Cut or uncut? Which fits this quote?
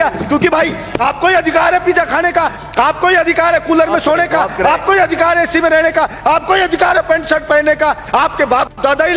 uncut